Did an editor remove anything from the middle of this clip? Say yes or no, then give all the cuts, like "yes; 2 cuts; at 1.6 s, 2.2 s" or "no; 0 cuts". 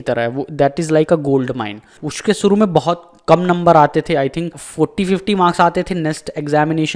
yes; 1 cut; at 2.0 s